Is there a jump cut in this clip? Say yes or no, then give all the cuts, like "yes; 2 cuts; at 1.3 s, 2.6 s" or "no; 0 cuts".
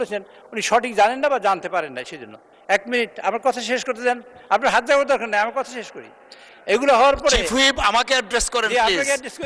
no; 0 cuts